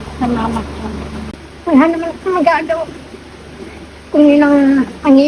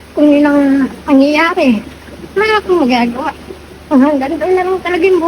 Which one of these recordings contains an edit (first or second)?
first